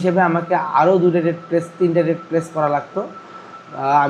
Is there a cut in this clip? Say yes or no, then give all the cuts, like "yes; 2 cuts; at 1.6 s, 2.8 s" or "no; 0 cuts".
no; 0 cuts